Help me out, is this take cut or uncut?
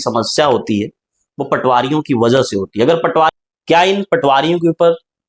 cut